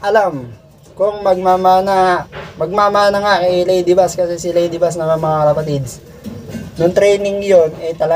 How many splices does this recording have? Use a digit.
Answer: 0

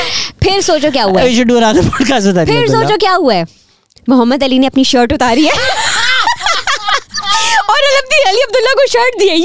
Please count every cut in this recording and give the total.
0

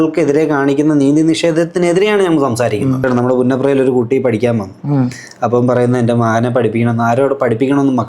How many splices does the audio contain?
1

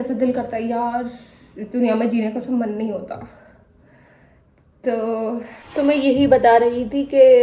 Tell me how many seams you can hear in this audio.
1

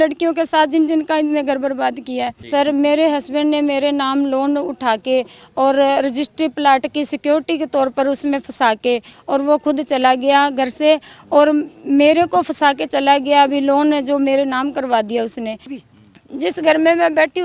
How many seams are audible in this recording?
2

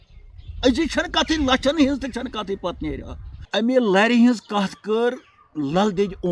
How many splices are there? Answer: 1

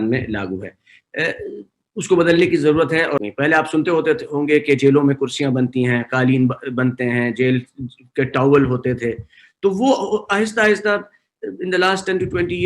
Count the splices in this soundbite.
1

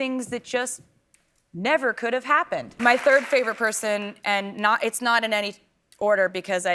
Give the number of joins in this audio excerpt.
1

